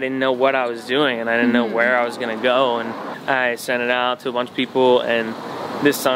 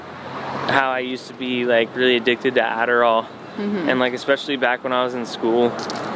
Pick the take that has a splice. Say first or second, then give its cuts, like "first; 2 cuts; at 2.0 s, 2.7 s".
first; 1 cut; at 3.1 s